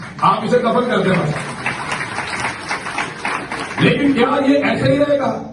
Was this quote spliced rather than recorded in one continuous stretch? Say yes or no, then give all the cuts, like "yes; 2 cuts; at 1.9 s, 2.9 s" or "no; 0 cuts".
no; 0 cuts